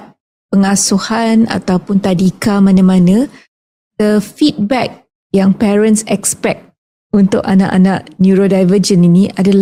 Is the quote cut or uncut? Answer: uncut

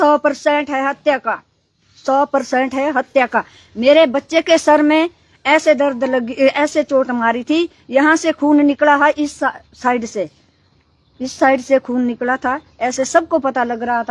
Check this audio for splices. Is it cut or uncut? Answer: uncut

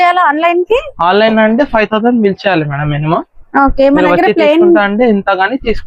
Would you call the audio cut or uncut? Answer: uncut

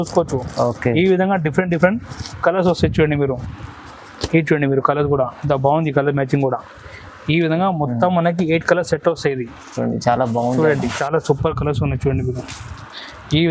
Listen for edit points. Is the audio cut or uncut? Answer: cut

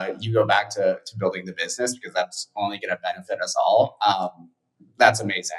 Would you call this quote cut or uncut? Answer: uncut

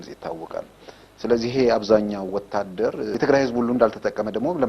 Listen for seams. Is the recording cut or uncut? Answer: cut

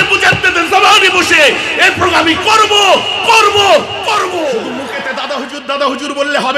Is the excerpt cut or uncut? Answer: cut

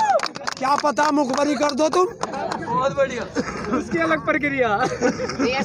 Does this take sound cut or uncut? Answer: uncut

